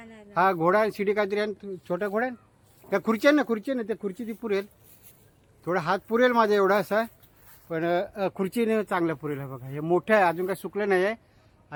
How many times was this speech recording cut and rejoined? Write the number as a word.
zero